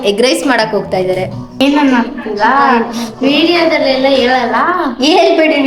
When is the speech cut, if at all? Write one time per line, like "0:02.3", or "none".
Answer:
0:01.6